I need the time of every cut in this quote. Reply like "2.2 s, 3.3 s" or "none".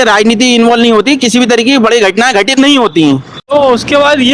none